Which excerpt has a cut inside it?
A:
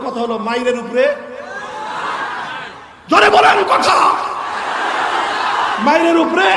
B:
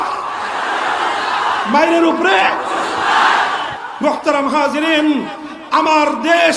B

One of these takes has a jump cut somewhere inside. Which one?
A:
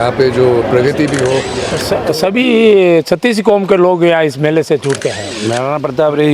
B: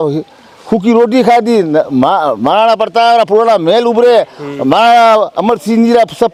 A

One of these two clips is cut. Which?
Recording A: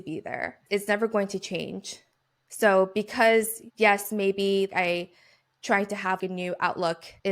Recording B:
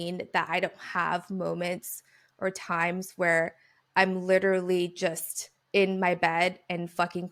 A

